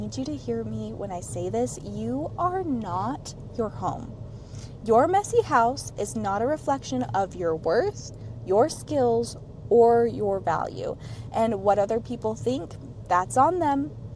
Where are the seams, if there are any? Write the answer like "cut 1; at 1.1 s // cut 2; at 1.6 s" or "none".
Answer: none